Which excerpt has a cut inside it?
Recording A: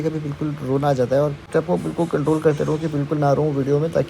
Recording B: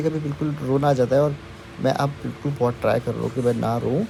A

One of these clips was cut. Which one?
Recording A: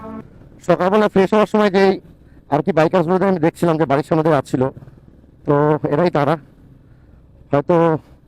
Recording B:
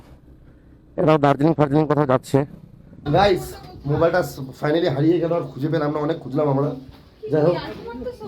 B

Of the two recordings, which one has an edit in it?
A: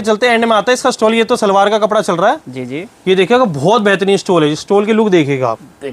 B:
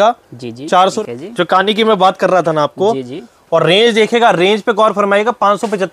B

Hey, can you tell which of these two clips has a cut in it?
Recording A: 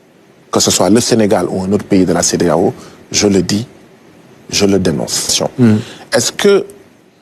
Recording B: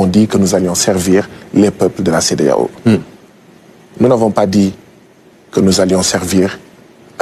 A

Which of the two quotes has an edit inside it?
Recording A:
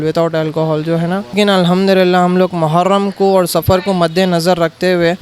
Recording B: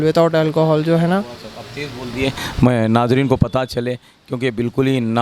A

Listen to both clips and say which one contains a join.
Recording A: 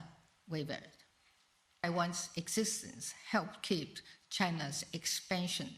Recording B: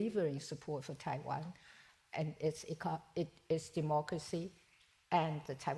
A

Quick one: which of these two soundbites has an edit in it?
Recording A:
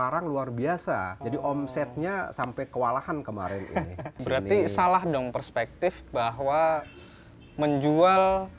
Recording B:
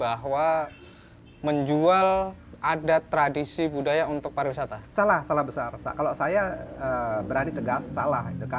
A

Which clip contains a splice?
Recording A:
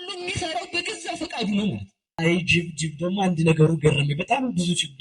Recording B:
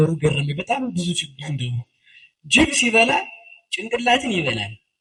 A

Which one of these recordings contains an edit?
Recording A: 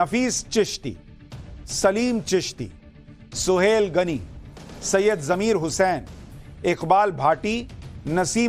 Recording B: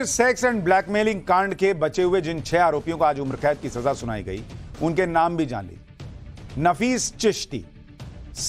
A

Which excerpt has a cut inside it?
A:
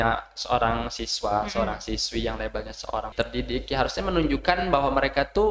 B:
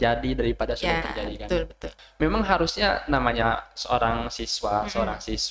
B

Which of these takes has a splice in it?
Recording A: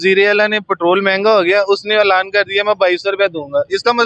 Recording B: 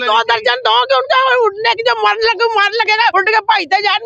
B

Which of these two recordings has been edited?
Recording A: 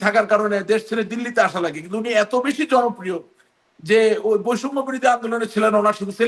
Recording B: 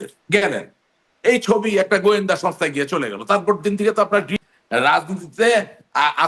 B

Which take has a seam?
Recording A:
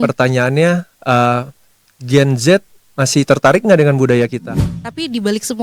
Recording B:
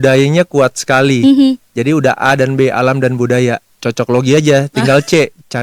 A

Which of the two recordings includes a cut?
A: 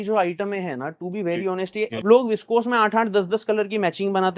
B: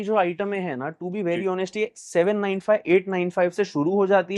A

